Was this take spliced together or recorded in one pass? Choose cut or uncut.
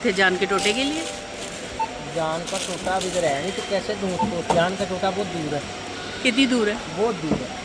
uncut